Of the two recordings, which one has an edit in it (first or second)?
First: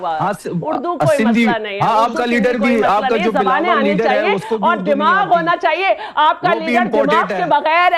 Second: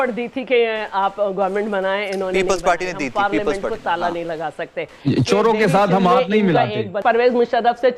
second